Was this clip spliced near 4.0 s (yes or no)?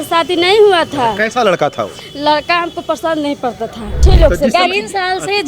yes